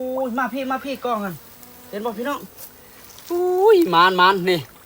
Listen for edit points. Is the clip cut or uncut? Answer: uncut